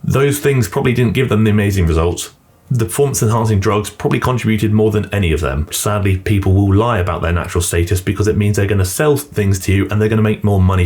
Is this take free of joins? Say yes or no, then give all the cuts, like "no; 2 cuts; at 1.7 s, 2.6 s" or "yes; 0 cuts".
no; 1 cut; at 5.8 s